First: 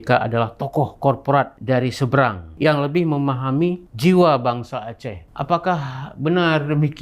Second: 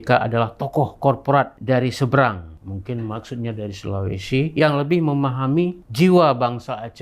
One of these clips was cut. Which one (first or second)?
first